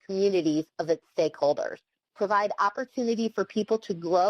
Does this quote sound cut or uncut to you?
cut